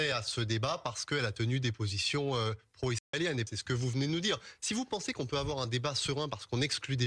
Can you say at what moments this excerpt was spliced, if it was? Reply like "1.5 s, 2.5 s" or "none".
3.5 s